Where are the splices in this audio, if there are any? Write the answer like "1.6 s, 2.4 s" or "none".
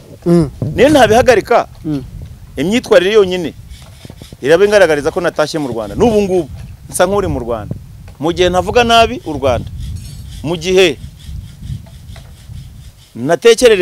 none

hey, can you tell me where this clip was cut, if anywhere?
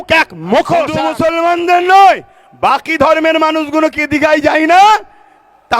1.1 s

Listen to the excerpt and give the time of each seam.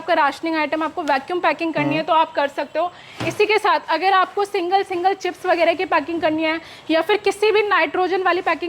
none

